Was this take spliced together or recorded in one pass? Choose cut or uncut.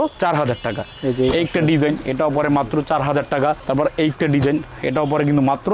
uncut